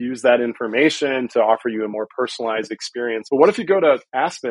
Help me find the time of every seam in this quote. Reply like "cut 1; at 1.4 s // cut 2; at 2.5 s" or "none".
cut 1; at 3.2 s

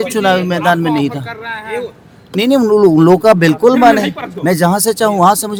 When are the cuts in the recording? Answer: none

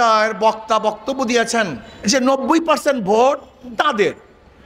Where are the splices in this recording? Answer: cut 1; at 1.8 s

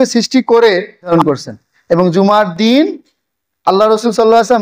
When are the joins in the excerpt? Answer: cut 1; at 1.1 s

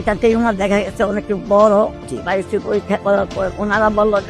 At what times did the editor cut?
cut 1; at 1.9 s // cut 2; at 3.5 s

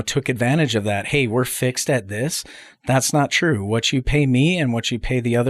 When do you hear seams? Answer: none

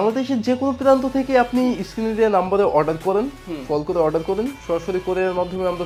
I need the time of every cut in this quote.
none

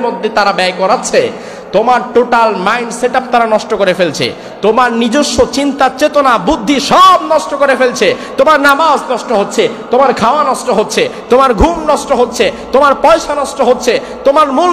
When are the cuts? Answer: none

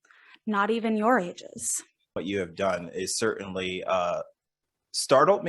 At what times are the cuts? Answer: cut 1; at 2.2 s

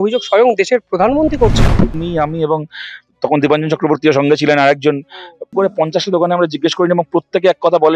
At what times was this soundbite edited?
cut 1; at 2.0 s // cut 2; at 5.5 s

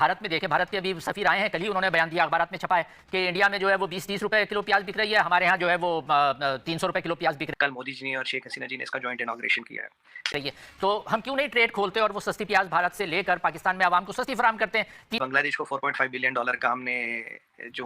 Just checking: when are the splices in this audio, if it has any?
cut 1; at 7.5 s // cut 2; at 10.3 s // cut 3; at 15.2 s

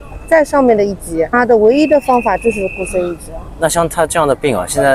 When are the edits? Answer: none

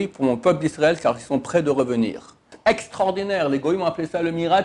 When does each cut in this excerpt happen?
cut 1; at 2.5 s

